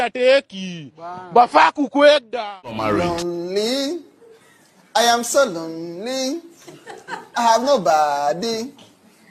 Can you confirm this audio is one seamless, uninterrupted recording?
no; 1 cut; at 2.8 s

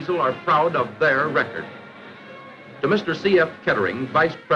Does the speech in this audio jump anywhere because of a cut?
no; 0 cuts

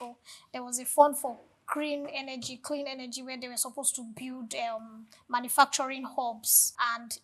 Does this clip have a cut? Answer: no; 0 cuts

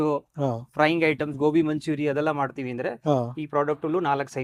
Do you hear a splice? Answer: no; 0 cuts

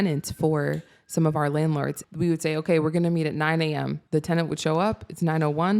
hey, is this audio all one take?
no; 2 cuts; at 2.0 s, 4.0 s

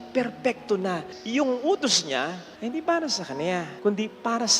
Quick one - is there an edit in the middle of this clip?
yes; 3 cuts; at 1.1 s, 2.5 s, 3.7 s

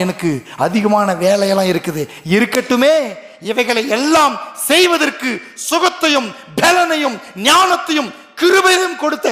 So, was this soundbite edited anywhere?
no; 0 cuts

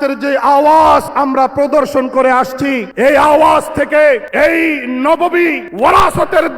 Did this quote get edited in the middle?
yes; 4 cuts; at 1.1 s, 2.9 s, 4.3 s, 5.6 s

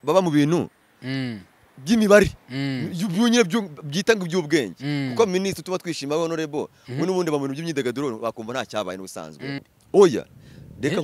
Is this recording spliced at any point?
yes; 1 cut; at 9.6 s

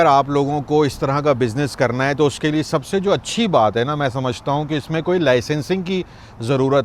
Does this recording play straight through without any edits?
yes; 0 cuts

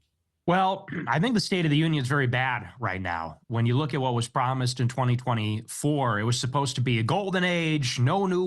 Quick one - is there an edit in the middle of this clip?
yes; 1 cut; at 5.1 s

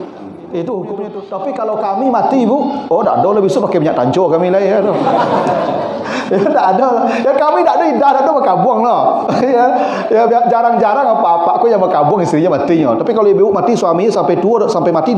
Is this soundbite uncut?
no; 1 cut; at 1.3 s

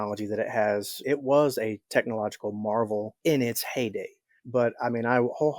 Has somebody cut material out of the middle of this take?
yes; 1 cut; at 0.9 s

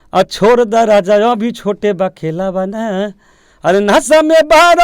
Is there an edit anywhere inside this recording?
no; 0 cuts

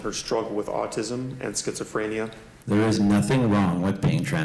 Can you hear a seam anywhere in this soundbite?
yes; 1 cut; at 2.5 s

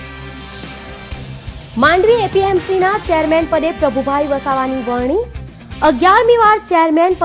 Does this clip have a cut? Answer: yes; 1 cut; at 1.1 s

